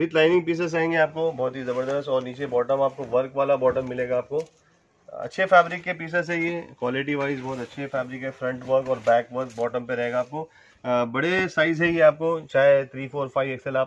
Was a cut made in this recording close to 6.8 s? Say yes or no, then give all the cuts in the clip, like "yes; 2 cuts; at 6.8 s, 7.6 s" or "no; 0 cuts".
no; 0 cuts